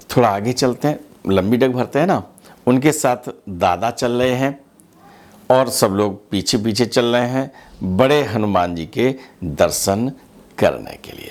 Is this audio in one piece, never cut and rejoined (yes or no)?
yes